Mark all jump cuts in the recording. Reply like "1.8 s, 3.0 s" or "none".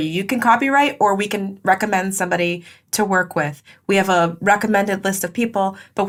none

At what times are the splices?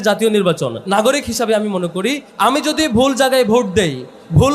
0.8 s, 2.3 s

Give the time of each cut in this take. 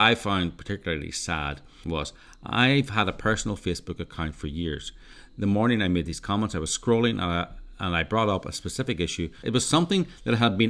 1.8 s, 9.4 s

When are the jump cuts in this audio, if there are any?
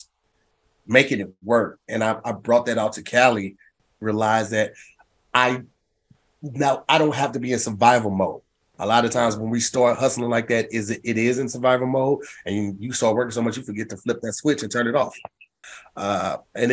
3.8 s, 15.5 s

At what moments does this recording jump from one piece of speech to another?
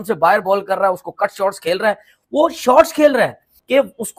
none

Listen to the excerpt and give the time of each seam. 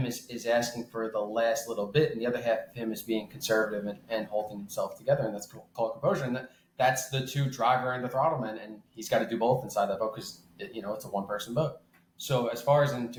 none

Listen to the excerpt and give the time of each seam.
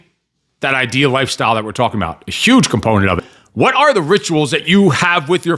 3.4 s

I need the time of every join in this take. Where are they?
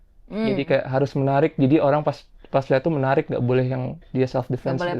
none

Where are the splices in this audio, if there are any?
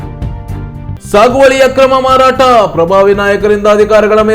1.0 s

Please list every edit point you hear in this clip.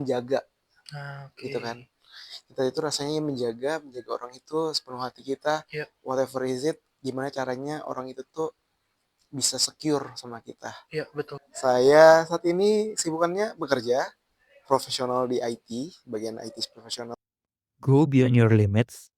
11.4 s, 17.1 s

